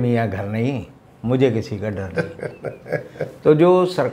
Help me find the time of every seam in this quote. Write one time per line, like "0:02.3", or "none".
none

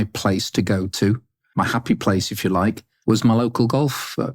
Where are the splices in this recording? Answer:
0:01.4
0:02.9

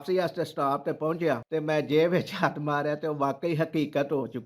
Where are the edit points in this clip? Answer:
0:01.4

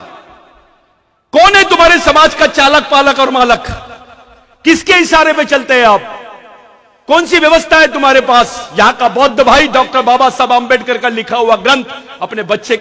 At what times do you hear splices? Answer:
none

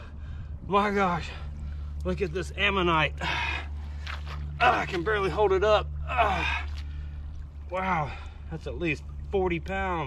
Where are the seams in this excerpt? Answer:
none

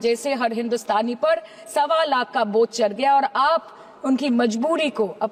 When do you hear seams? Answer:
none

